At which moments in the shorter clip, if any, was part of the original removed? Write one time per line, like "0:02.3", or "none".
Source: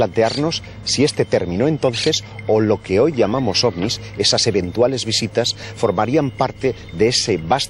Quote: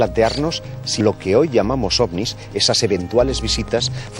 0:01.0